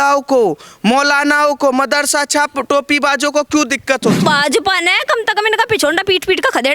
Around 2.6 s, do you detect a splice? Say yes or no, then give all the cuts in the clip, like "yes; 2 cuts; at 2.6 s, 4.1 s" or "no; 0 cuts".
no; 1 cut; at 4.2 s